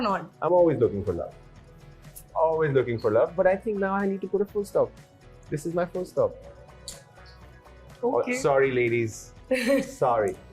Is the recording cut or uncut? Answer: uncut